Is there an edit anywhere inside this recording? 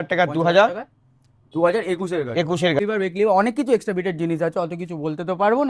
yes; 1 cut; at 2.8 s

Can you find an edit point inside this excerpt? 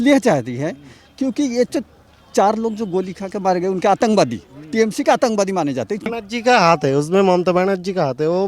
yes; 1 cut; at 6.1 s

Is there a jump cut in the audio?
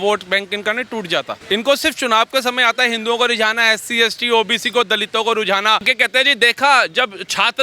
yes; 2 cuts; at 1.4 s, 5.9 s

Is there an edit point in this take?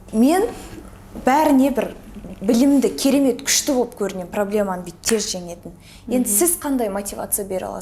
no; 0 cuts

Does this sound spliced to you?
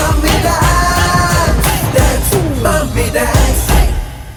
no; 0 cuts

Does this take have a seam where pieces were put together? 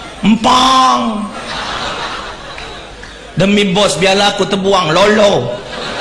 no; 0 cuts

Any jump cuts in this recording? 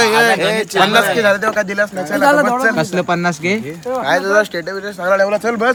no; 0 cuts

